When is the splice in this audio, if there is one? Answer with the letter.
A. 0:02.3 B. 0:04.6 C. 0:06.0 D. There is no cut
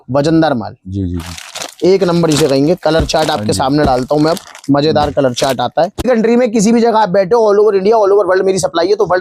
C